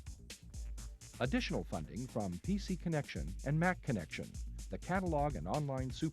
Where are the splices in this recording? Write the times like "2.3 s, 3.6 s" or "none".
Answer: 1.1 s